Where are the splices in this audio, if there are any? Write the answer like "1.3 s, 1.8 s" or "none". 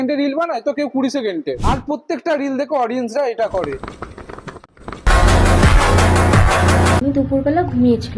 7.0 s